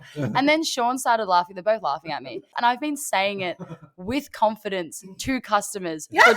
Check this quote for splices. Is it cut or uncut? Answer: cut